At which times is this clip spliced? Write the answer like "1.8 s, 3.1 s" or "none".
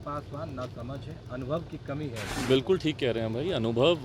2.3 s